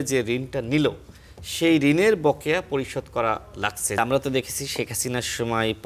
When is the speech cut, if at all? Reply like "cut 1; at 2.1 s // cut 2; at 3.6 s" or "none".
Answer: cut 1; at 4.0 s